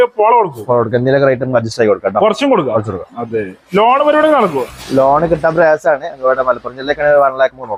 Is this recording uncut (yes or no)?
yes